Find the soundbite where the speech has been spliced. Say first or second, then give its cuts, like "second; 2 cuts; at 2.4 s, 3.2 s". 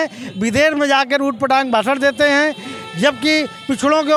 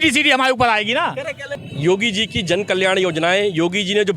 second; 1 cut; at 1.6 s